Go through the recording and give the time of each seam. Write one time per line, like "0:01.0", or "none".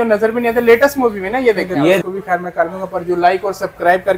0:02.0